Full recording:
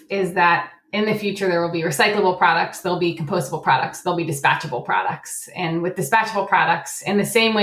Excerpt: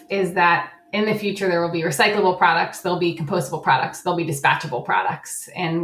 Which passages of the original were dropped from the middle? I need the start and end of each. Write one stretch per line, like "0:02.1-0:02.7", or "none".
none